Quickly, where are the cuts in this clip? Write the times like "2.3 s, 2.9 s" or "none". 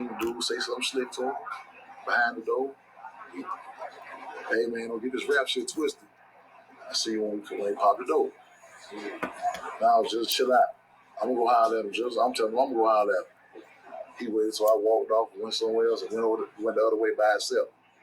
14.6 s